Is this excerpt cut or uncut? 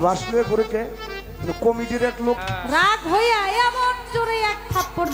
cut